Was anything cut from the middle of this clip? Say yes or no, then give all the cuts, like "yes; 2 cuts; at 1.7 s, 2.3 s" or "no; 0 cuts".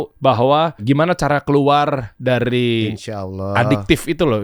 yes; 2 cuts; at 0.8 s, 2.1 s